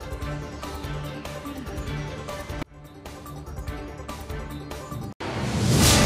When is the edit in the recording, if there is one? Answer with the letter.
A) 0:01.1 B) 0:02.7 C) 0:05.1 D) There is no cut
C